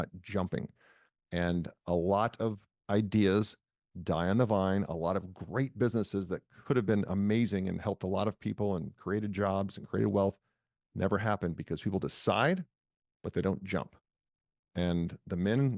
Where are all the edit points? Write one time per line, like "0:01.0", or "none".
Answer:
none